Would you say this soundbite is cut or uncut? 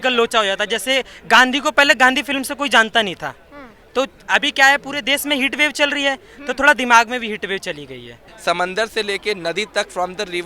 cut